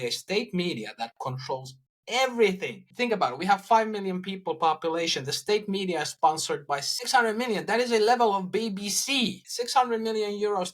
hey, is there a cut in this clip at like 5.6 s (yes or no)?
no